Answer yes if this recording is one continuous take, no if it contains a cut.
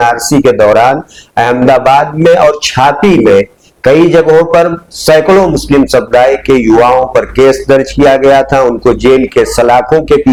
yes